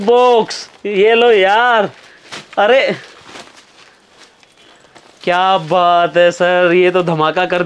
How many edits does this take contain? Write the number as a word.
zero